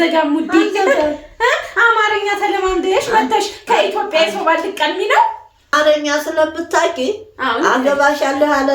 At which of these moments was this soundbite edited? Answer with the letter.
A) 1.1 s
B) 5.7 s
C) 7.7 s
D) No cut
B